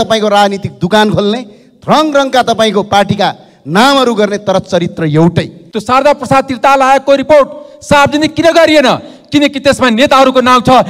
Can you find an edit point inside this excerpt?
yes; 1 cut; at 5.6 s

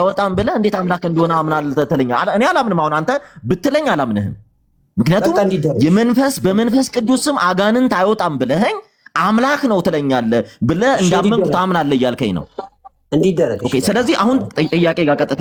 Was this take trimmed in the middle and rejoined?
no; 0 cuts

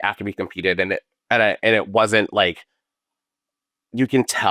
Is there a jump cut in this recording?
no; 0 cuts

